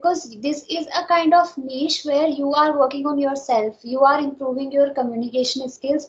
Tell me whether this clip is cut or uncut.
uncut